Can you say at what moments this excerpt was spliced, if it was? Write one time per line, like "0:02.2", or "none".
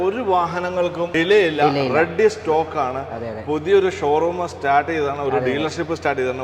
0:01.1